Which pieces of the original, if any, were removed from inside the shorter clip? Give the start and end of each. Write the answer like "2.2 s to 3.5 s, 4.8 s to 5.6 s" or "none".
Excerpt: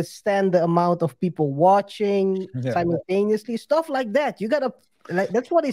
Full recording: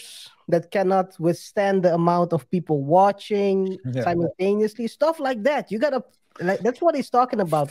none

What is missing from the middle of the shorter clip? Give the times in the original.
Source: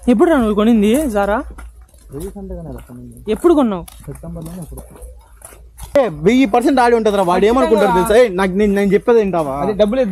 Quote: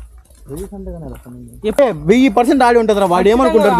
3.4 s to 5.9 s

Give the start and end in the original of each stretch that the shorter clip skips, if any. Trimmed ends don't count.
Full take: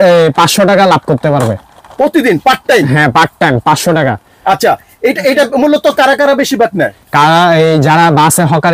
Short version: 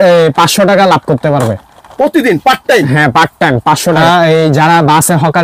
4.0 s to 7.3 s

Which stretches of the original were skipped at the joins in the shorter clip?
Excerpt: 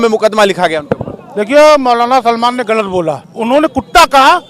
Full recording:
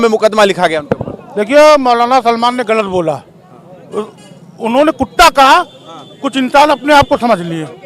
3.3 s to 4.5 s

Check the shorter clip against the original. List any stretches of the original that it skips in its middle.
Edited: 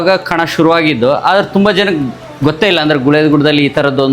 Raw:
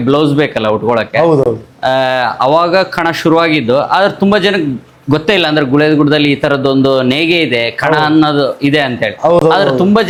none

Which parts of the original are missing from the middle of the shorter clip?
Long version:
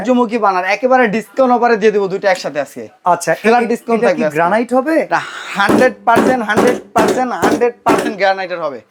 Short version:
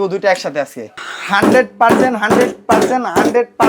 3.0 s to 5.3 s

